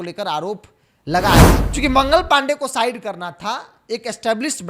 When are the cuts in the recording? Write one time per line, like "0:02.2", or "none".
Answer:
0:01.5